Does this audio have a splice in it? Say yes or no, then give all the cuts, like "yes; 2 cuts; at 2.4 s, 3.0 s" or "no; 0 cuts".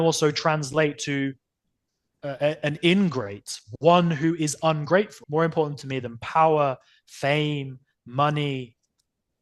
yes; 1 cut; at 5.2 s